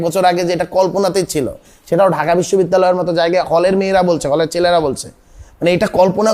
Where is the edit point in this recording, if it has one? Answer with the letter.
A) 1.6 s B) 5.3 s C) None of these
C